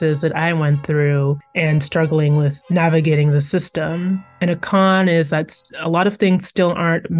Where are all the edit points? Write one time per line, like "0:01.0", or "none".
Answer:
0:04.3